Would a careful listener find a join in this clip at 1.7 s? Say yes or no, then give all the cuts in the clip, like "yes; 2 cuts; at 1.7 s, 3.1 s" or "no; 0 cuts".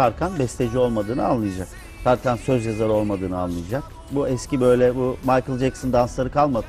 no; 1 cut; at 4.0 s